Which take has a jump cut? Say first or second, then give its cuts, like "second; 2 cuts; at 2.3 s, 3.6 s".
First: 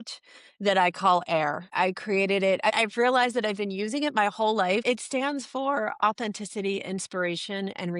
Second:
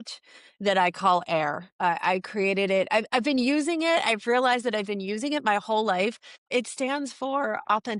first; 3 cuts; at 1.7 s, 2.8 s, 4.8 s